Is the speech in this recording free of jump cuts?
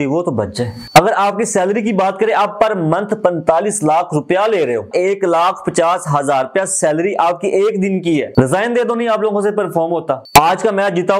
no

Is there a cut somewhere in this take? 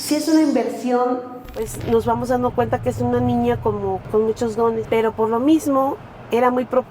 yes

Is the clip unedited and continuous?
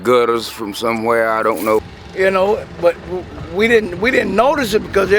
no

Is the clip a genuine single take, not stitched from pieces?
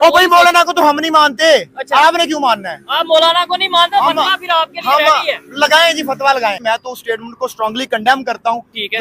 no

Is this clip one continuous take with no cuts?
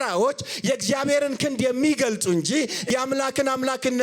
no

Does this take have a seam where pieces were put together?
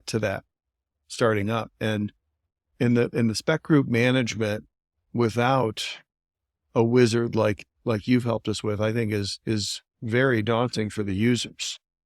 no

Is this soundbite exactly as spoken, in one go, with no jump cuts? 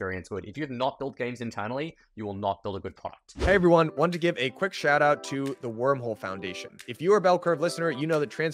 no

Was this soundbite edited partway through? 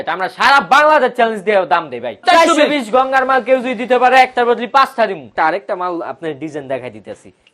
yes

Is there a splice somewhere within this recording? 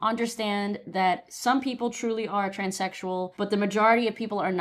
no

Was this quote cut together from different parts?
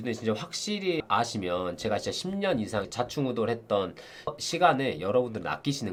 no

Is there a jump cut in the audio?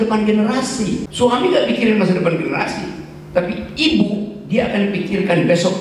yes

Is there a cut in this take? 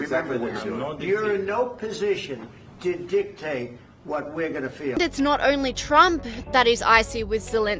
yes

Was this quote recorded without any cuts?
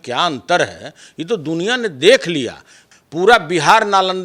no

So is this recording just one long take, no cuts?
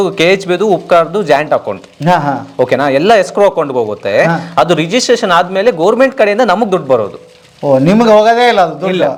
yes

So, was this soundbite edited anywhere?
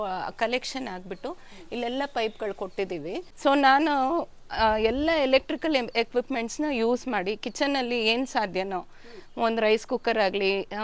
yes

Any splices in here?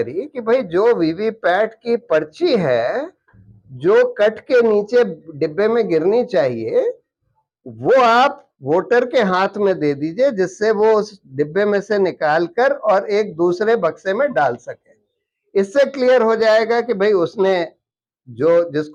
no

